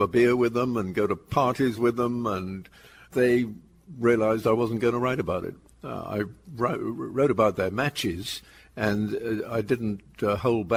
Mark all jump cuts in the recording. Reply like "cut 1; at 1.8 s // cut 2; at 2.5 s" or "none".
none